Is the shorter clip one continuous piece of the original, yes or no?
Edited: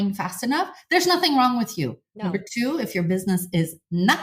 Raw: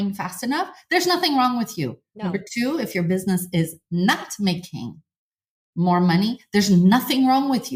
yes